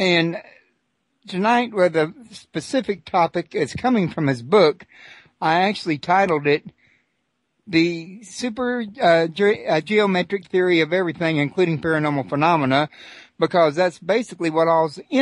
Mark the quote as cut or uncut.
uncut